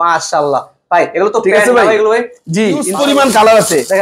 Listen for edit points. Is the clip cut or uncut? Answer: cut